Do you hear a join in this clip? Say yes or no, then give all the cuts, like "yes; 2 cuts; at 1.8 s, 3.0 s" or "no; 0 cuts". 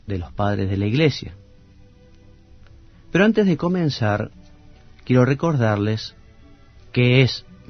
no; 0 cuts